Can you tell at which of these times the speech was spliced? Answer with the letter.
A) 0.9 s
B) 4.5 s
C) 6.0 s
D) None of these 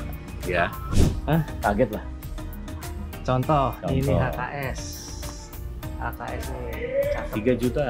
A